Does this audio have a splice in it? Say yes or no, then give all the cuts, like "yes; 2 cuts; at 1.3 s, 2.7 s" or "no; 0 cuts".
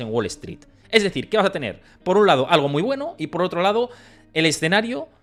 no; 0 cuts